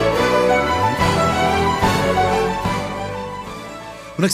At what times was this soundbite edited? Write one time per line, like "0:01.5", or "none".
0:01.8